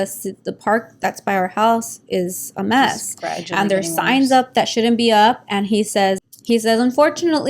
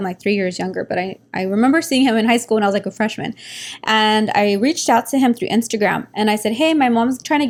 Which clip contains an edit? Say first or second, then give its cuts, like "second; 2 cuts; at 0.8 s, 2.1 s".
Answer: first; 1 cut; at 6.2 s